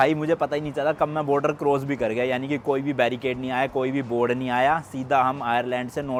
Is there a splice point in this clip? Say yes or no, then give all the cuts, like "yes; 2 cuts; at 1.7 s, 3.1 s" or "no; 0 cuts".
no; 0 cuts